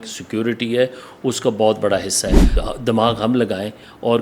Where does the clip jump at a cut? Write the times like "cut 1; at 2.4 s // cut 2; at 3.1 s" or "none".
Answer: cut 1; at 2.6 s